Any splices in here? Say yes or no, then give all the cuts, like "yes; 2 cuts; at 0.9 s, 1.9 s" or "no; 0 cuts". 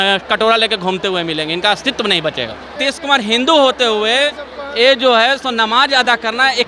yes; 1 cut; at 2.8 s